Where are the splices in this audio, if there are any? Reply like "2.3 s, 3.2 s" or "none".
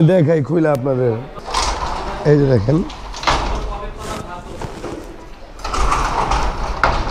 1.3 s